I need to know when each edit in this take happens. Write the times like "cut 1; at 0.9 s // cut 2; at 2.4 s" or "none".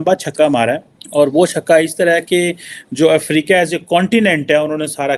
cut 1; at 0.9 s

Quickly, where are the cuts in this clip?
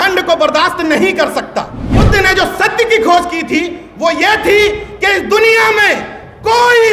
cut 1; at 1.8 s

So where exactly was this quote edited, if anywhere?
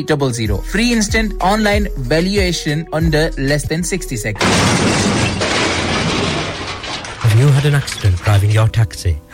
cut 1; at 4.3 s

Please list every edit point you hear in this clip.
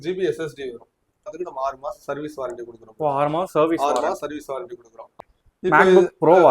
cut 1; at 1.3 s // cut 2; at 5.2 s

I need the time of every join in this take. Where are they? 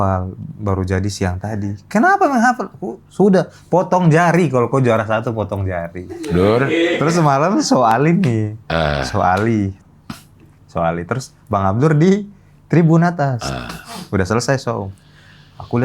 cut 1; at 7.0 s

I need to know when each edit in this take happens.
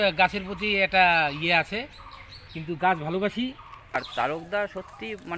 cut 1; at 4.0 s

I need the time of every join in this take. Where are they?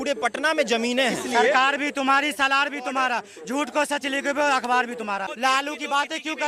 cut 1; at 1.2 s // cut 2; at 5.3 s

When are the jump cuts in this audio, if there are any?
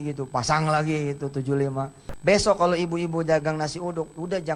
cut 1; at 2.0 s

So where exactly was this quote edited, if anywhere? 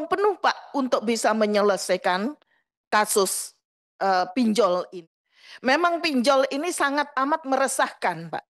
cut 1; at 4.9 s

